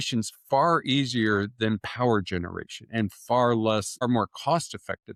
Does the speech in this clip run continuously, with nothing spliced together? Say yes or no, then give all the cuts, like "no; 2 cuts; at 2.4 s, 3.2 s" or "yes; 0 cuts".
yes; 0 cuts